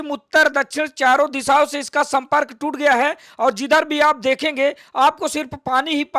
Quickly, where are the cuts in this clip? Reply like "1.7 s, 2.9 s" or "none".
none